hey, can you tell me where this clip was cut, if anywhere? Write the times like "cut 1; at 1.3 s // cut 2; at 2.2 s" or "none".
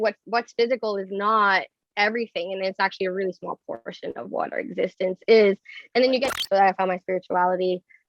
cut 1; at 6.3 s